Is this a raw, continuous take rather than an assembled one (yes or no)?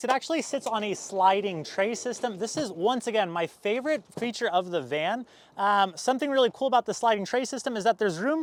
yes